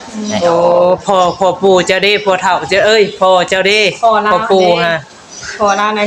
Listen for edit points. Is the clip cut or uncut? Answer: uncut